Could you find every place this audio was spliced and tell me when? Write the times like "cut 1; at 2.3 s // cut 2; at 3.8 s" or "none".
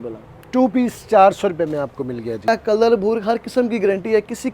cut 1; at 2.5 s